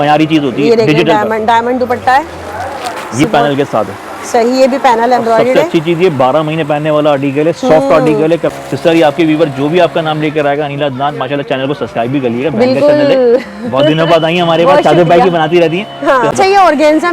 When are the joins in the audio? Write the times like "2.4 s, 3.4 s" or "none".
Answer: 3.2 s, 8.4 s, 16.3 s